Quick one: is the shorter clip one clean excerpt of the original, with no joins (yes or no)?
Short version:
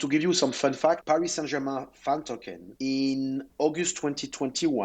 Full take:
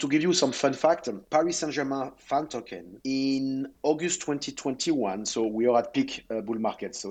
no